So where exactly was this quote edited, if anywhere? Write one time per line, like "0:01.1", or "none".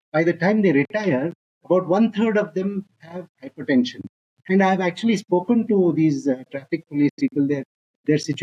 none